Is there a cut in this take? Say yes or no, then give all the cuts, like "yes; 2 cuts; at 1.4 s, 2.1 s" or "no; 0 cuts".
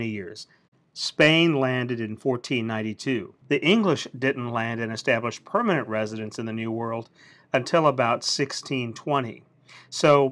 yes; 1 cut; at 3.0 s